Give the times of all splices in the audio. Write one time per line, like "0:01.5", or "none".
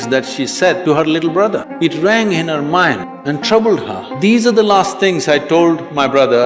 0:00.8
0:01.7
0:03.1
0:04.0